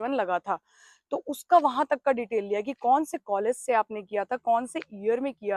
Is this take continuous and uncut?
yes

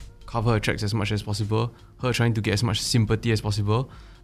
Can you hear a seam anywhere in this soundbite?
no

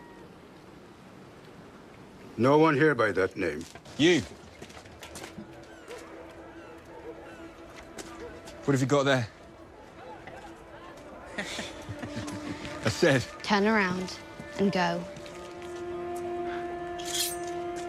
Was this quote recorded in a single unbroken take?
no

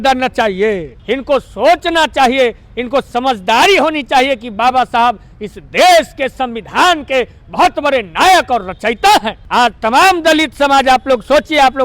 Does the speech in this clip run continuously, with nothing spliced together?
no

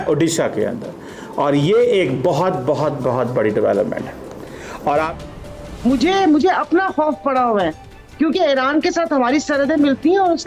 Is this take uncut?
no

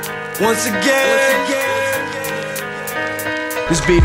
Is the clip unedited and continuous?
yes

